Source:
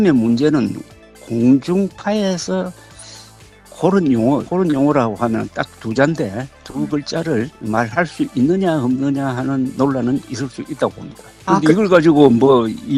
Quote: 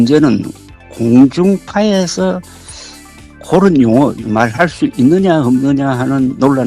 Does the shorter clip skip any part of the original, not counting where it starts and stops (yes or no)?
yes